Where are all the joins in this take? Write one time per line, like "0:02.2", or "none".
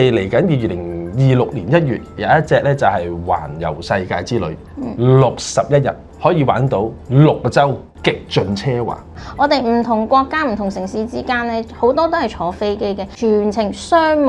0:06.1
0:07.0
0:07.9
0:13.1